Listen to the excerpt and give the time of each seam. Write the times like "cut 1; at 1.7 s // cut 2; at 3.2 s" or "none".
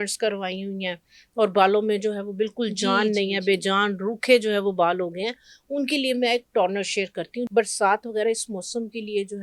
cut 1; at 7.5 s